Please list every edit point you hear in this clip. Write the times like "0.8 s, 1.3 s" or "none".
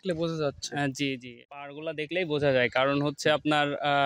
1.5 s